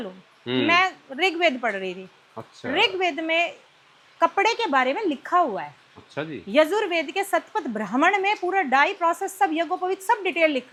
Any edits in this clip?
no; 0 cuts

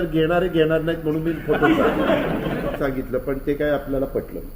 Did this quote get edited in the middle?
yes; 1 cut; at 2.8 s

